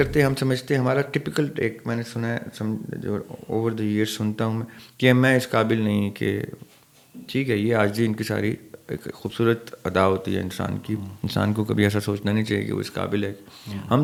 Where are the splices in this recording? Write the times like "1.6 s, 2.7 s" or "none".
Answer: none